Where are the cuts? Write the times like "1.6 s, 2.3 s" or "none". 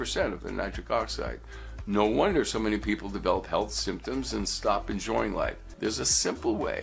5.7 s